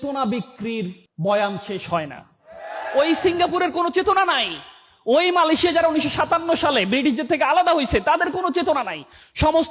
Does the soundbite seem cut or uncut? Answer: uncut